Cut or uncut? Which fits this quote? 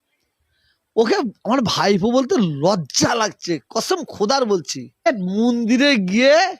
cut